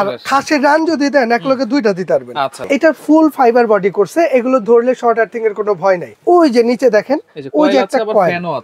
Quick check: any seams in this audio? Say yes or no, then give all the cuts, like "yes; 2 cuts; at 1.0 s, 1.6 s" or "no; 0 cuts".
yes; 2 cuts; at 2.6 s, 6.1 s